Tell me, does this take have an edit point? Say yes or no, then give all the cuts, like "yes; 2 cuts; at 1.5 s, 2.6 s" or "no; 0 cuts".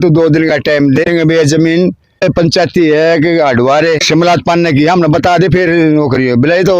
yes; 3 cuts; at 1.0 s, 2.2 s, 4.0 s